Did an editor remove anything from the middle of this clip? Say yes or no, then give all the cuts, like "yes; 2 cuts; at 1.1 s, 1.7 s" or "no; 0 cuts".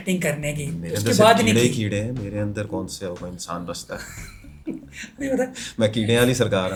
no; 0 cuts